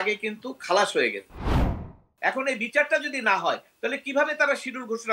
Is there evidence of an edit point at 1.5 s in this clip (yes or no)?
yes